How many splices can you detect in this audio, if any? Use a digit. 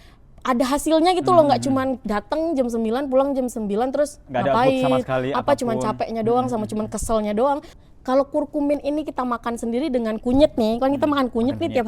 1